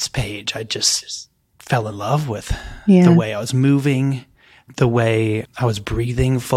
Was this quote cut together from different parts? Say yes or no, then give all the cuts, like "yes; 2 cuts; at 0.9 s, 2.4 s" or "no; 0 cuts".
yes; 2 cuts; at 4.6 s, 5.5 s